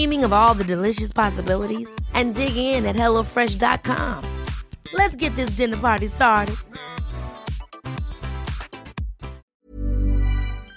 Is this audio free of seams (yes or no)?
no